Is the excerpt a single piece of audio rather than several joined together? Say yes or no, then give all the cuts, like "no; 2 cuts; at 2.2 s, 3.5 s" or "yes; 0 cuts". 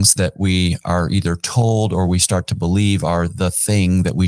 yes; 0 cuts